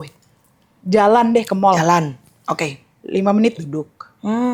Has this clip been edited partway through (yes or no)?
no